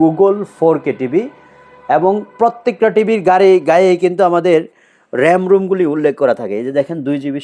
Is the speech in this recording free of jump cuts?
yes; 0 cuts

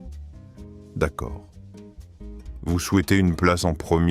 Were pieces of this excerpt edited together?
yes; 1 cut; at 0.9 s

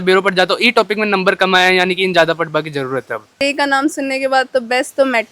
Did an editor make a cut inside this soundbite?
yes; 1 cut; at 3.4 s

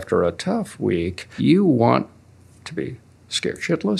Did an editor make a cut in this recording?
yes; 1 cut; at 1.3 s

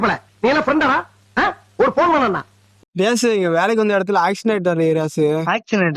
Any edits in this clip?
yes; 1 cut; at 2.7 s

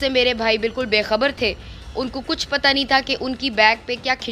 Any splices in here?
no; 0 cuts

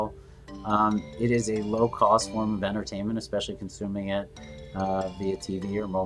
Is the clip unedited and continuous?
yes; 0 cuts

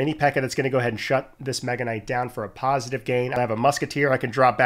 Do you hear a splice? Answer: yes; 1 cut; at 3.3 s

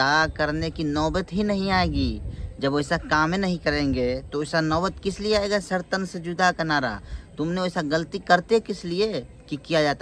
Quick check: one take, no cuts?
yes; 0 cuts

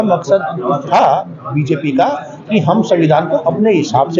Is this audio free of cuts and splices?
yes; 0 cuts

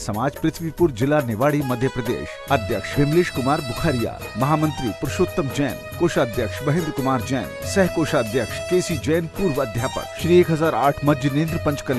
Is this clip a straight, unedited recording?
no; 2 cuts; at 8.6 s, 10.1 s

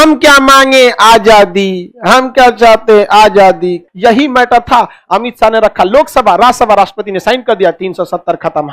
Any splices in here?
yes; 1 cut; at 3.8 s

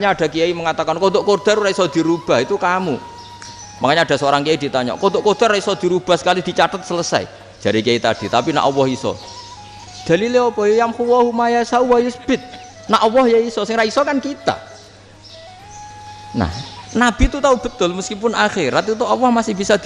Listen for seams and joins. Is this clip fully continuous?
yes; 0 cuts

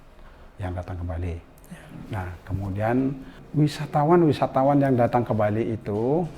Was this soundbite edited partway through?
yes; 1 cut; at 3.3 s

